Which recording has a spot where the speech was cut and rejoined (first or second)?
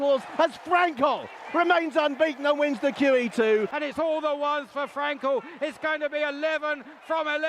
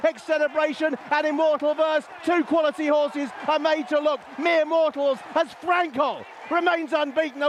first